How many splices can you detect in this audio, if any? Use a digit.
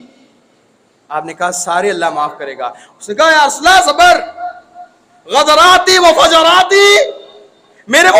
0